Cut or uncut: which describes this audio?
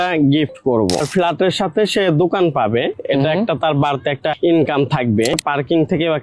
cut